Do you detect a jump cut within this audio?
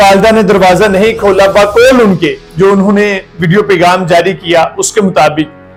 no; 0 cuts

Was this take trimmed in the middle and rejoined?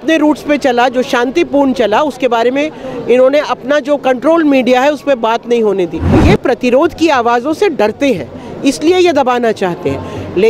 yes; 1 cut; at 6.1 s

